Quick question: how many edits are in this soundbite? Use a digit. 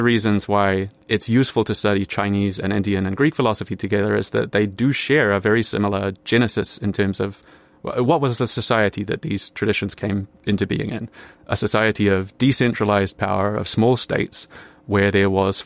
1